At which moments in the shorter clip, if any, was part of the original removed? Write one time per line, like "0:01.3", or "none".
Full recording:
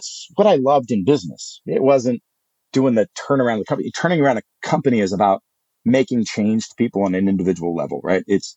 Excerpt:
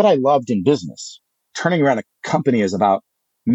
0:01.3